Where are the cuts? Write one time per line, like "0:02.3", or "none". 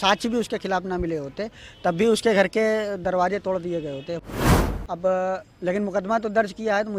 0:04.3